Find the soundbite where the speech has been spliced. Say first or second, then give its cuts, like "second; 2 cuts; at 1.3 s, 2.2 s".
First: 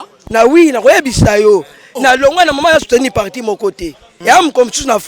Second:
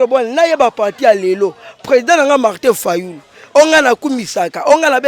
first; 1 cut; at 4.1 s